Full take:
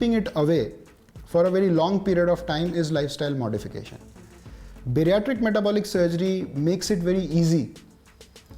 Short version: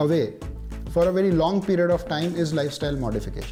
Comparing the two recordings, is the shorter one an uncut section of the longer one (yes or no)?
yes